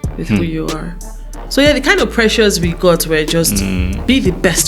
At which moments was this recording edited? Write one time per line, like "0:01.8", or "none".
0:01.4